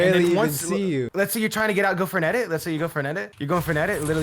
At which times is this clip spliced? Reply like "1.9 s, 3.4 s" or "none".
1.1 s, 3.3 s

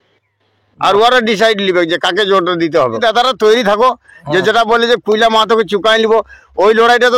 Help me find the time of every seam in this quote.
3.0 s

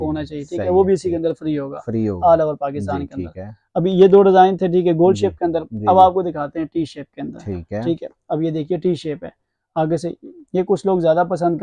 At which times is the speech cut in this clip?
none

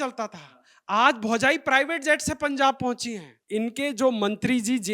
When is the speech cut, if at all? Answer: 3.3 s

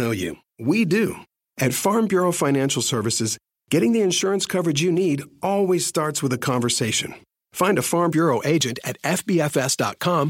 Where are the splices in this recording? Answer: none

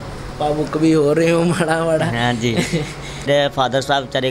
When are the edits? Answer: 3.3 s

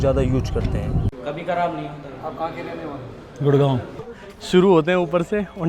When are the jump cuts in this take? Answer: 1.1 s, 4.2 s

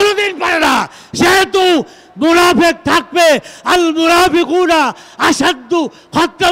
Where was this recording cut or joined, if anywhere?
none

